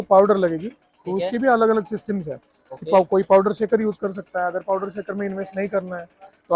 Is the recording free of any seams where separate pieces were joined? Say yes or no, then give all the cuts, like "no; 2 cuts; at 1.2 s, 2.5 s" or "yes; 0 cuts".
yes; 0 cuts